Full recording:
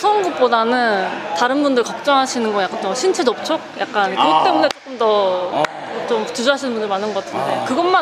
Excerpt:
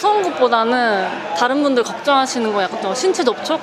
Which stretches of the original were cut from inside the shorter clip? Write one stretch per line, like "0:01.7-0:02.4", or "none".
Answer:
none

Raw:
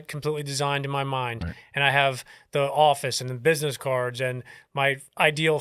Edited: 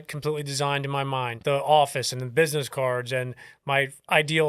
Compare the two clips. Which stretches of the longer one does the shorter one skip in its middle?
0:01.3-0:02.4

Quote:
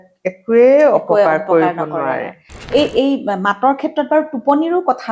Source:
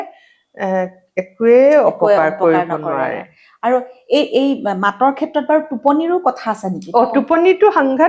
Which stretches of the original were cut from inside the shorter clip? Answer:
0:03.5-0:03.9

